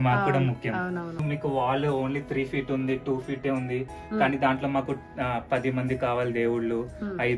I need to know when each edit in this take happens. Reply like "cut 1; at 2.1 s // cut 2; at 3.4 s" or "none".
cut 1; at 1.1 s